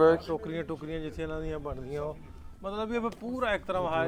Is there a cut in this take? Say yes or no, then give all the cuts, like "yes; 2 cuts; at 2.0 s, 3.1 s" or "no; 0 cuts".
no; 0 cuts